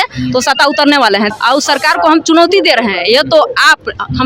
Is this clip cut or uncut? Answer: cut